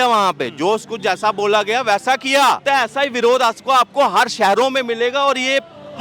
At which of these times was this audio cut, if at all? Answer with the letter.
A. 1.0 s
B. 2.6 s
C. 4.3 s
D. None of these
B